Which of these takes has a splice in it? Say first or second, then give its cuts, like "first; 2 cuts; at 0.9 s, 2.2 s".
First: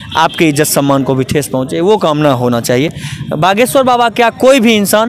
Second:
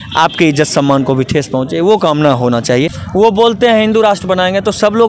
second; 1 cut; at 3.0 s